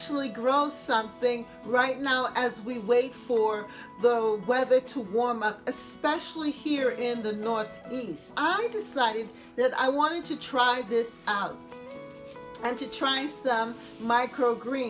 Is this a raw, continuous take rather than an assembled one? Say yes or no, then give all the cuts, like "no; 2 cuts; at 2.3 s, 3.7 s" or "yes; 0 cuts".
no; 1 cut; at 8.3 s